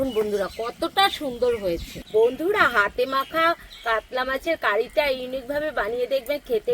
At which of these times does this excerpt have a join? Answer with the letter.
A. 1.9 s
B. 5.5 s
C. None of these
A